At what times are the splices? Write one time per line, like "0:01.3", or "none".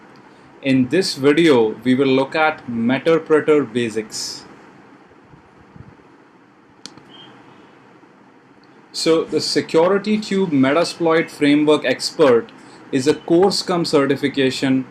0:12.9